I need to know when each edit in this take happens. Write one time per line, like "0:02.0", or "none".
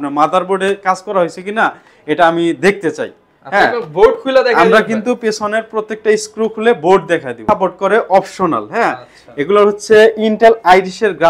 0:07.3